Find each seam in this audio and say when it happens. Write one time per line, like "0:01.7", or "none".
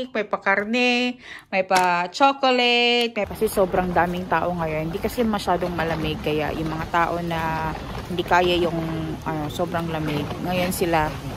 0:03.4